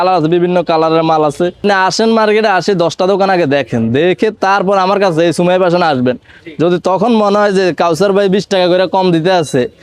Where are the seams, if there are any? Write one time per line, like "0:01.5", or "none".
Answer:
0:01.6